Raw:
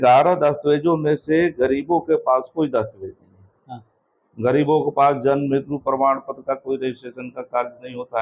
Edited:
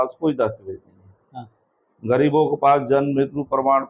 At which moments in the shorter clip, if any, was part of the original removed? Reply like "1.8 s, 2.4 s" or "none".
none